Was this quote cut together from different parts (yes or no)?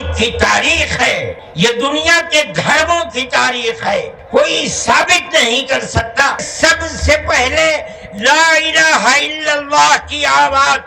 yes